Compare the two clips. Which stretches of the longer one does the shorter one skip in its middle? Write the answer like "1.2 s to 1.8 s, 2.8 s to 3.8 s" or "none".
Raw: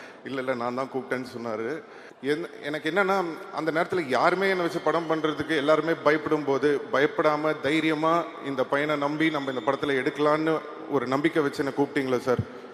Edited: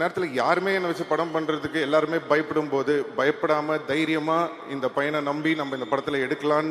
none